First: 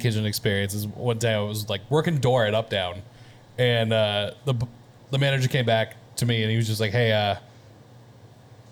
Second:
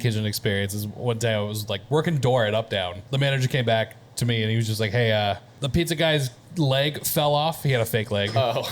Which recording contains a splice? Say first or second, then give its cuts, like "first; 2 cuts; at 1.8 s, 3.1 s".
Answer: second; 2 cuts; at 3.0 s, 5.5 s